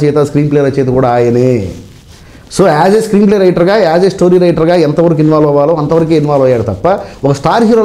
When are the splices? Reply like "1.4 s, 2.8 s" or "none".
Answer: none